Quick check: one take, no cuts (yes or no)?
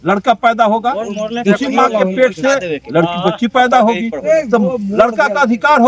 yes